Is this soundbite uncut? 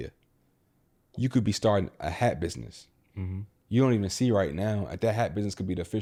yes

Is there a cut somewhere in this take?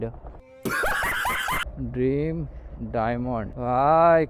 yes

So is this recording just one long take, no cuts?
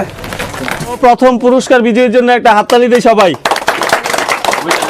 no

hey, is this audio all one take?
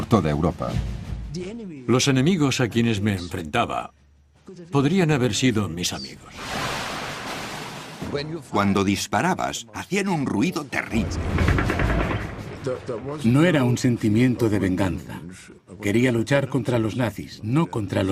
yes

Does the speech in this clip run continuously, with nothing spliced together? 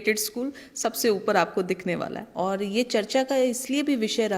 no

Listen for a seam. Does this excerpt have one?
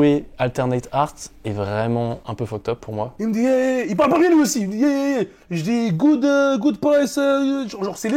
yes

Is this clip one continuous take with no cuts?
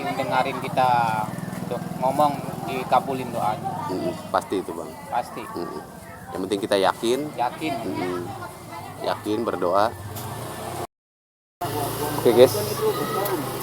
no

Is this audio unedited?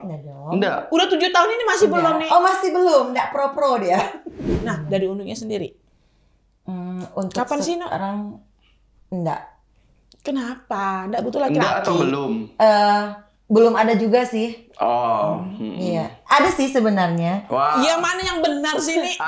no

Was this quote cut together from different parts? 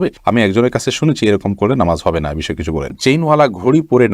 yes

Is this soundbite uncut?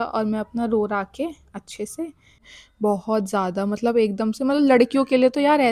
no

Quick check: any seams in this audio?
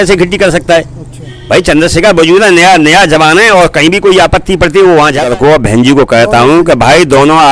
yes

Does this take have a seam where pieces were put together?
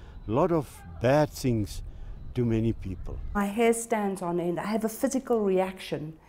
yes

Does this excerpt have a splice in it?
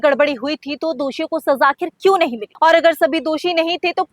yes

